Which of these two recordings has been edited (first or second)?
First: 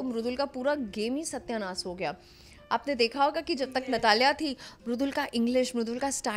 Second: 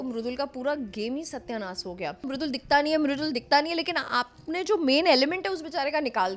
second